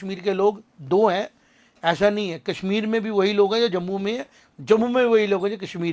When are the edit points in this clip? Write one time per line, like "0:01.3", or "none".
none

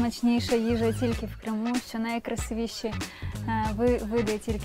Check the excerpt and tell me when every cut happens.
none

